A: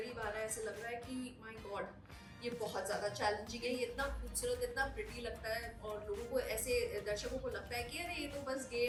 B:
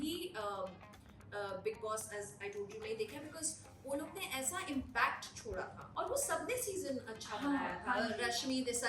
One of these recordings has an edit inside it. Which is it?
B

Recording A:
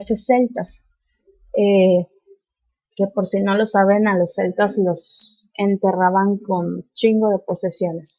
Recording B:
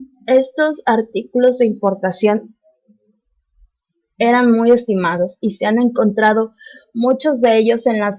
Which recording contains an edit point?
B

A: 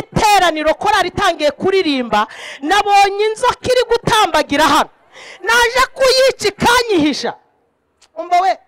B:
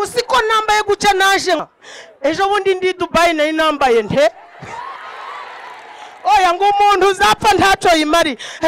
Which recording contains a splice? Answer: B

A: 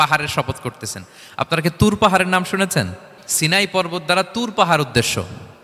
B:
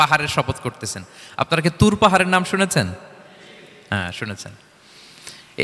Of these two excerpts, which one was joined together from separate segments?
A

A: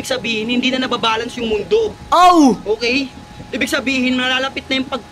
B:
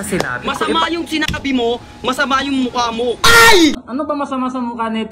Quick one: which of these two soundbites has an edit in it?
B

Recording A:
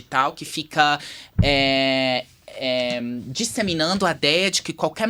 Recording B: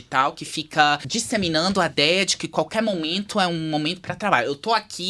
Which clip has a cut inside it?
B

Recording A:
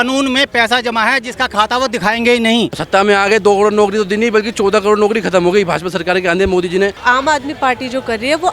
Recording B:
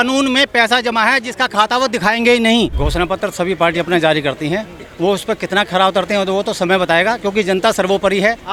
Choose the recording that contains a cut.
A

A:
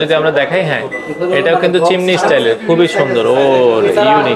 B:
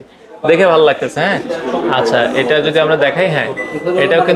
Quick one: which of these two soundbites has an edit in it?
B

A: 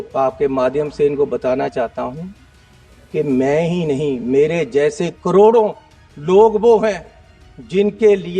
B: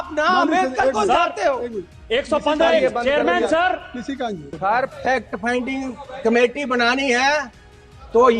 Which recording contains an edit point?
B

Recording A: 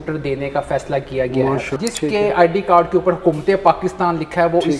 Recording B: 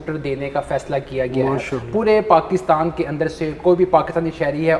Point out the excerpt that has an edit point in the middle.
A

